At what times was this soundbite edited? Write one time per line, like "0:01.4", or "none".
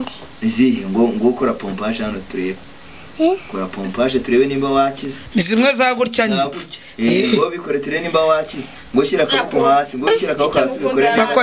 none